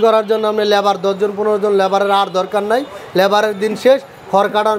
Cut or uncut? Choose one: uncut